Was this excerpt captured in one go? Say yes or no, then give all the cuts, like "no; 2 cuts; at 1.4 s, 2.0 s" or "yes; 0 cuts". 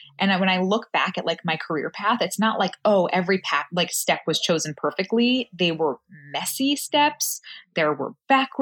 yes; 0 cuts